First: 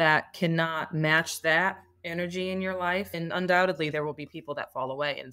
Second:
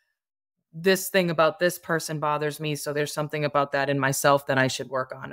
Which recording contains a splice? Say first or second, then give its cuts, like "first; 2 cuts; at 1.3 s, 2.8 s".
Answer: first; 1 cut; at 3.1 s